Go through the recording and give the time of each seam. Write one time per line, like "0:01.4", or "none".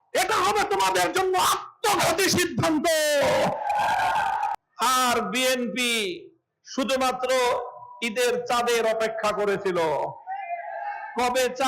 0:04.6